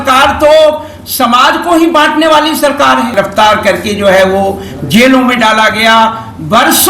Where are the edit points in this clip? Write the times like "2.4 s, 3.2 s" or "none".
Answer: 3.1 s